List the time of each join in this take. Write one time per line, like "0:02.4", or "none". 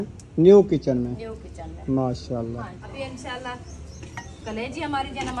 0:02.8